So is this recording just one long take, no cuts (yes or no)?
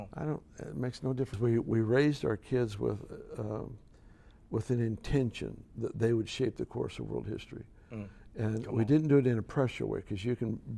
no